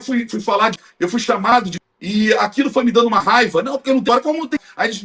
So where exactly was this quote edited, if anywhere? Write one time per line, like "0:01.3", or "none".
0:00.8
0:01.8
0:04.2